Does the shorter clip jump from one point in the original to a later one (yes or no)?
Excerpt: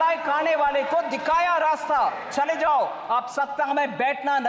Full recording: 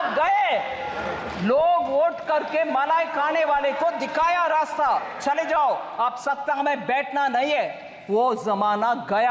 no